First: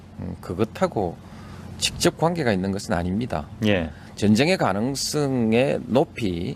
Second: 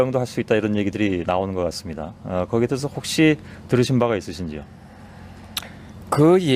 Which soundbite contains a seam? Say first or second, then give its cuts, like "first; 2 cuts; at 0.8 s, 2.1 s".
second; 1 cut; at 1.8 s